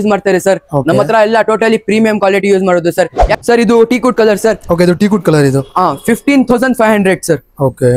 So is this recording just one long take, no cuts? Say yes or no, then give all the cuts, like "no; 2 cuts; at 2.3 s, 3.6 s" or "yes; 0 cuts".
no; 1 cut; at 3.2 s